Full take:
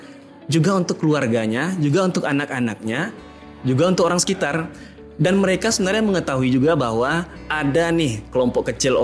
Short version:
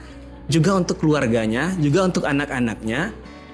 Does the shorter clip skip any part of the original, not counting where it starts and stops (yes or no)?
no